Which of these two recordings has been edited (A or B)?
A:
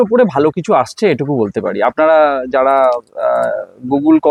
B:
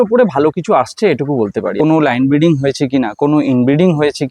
B